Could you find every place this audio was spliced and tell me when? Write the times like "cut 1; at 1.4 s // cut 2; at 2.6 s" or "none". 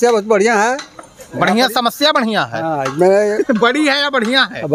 none